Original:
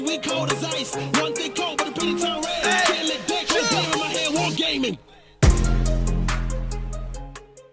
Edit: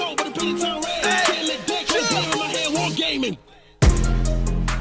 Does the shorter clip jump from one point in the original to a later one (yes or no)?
no